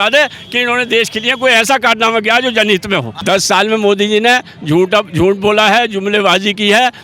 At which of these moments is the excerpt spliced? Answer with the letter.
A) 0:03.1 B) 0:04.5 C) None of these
A